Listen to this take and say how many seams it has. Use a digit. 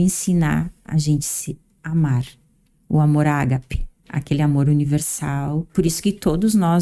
2